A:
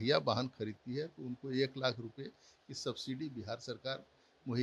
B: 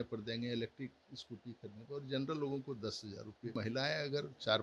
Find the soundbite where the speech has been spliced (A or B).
B